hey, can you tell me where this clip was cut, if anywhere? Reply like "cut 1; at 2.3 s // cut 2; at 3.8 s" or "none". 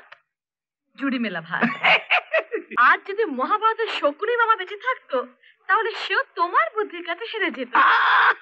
cut 1; at 2.6 s